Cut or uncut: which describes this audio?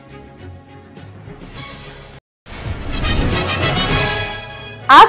uncut